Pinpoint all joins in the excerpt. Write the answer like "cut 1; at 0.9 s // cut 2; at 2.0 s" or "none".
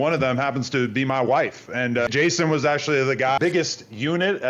cut 1; at 2.1 s // cut 2; at 3.4 s